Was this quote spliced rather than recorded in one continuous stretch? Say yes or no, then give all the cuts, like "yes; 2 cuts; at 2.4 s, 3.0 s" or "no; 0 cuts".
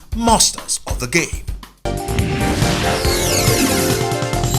yes; 1 cut; at 1.9 s